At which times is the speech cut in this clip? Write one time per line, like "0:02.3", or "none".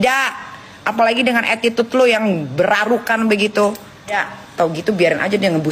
0:04.1